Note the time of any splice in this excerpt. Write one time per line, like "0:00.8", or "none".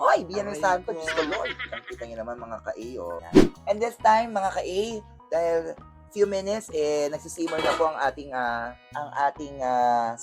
0:03.2